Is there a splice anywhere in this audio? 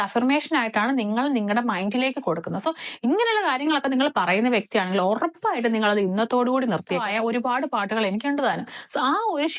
yes; 1 cut; at 7.0 s

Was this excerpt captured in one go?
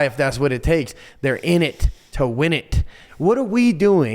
no; 1 cut; at 3.0 s

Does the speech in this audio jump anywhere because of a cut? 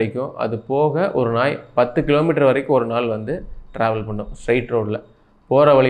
no; 0 cuts

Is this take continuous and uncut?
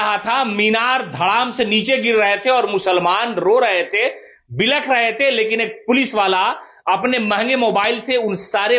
yes; 0 cuts

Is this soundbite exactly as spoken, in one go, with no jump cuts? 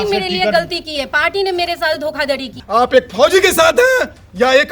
no; 1 cut; at 2.5 s

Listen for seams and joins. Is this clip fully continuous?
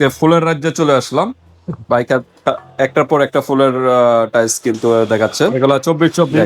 yes; 0 cuts

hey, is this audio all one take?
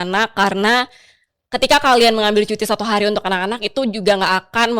yes; 0 cuts

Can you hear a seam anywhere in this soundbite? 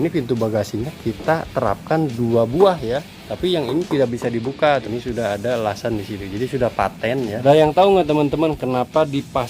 yes; 3 cuts; at 3.2 s, 4.8 s, 7.4 s

